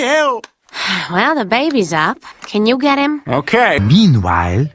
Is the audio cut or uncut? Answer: cut